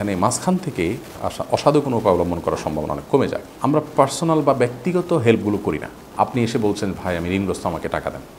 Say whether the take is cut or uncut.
cut